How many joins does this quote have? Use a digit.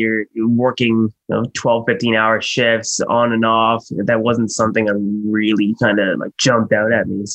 1